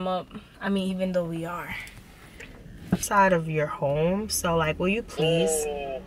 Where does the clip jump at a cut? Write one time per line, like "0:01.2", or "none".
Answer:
0:03.0

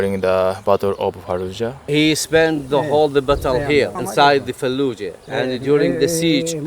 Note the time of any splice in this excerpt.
0:01.9

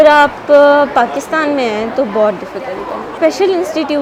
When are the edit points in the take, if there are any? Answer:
0:03.1

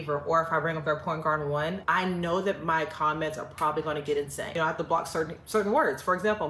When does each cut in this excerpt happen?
0:01.8
0:04.5

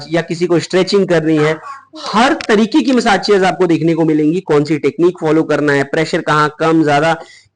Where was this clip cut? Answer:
none

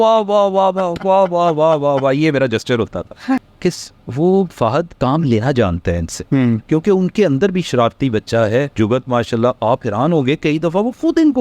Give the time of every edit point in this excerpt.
0:03.5
0:04.9
0:06.6
0:08.7

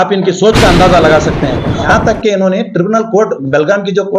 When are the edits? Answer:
0:01.9

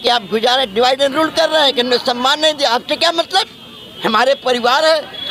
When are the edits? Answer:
none

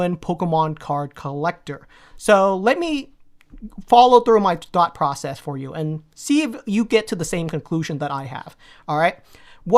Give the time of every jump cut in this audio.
0:01.9

